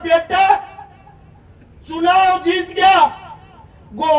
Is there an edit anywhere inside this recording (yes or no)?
no